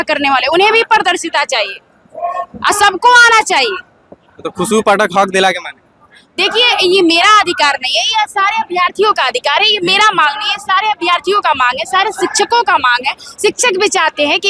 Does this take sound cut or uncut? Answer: uncut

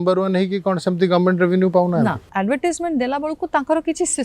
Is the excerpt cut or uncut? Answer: cut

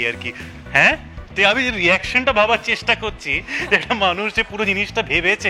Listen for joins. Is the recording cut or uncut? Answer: uncut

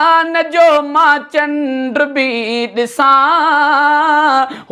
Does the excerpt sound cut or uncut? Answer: uncut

